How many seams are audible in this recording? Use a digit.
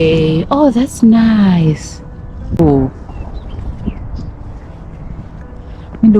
1